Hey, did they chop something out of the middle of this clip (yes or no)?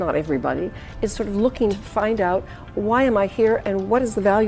yes